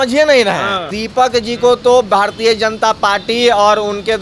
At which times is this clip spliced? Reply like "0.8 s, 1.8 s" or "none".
1.0 s